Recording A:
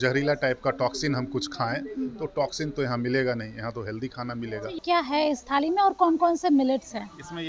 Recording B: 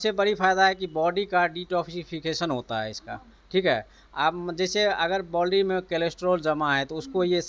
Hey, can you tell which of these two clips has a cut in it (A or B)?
A